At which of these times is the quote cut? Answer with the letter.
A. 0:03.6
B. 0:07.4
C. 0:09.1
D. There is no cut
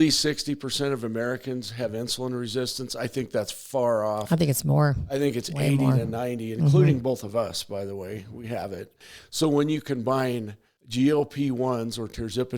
C